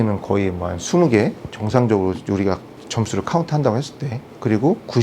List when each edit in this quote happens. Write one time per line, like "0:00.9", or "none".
none